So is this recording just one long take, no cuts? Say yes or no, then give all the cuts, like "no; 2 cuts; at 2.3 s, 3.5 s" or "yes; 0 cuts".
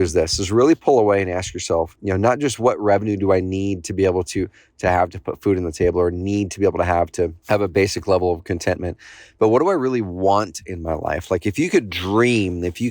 no; 2 cuts; at 1.9 s, 7.4 s